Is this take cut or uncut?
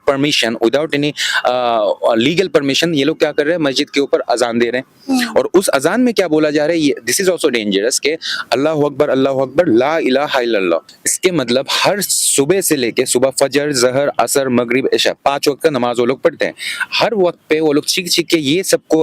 cut